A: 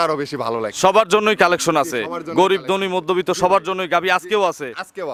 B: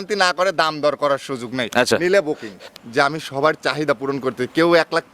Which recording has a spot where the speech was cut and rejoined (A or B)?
B